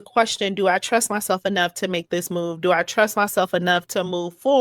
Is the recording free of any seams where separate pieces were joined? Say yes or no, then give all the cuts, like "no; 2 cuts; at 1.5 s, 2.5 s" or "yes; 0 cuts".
yes; 0 cuts